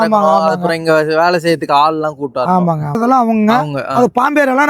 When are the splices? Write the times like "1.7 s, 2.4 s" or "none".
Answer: 3.0 s